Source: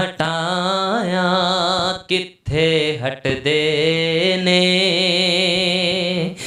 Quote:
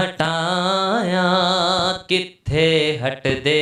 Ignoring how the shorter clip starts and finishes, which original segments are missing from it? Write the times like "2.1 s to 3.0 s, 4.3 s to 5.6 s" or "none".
none